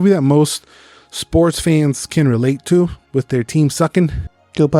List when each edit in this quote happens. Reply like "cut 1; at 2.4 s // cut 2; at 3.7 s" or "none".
none